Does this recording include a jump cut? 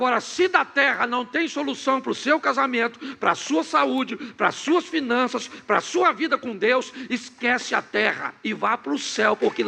no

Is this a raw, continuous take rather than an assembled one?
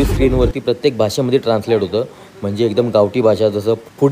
yes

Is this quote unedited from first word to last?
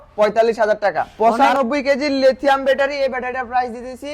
no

